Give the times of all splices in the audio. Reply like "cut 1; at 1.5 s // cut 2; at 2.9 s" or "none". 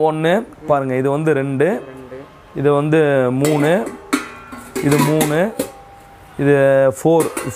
none